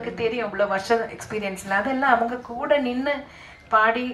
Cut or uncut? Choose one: uncut